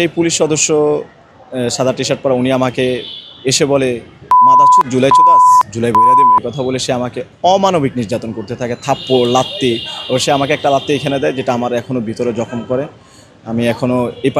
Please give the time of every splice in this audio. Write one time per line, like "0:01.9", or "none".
none